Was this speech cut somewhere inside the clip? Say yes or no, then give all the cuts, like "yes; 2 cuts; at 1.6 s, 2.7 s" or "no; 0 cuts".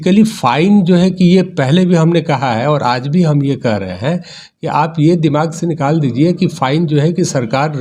no; 0 cuts